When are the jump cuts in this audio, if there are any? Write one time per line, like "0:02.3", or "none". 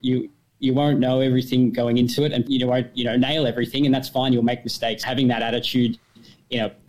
0:02.4
0:05.0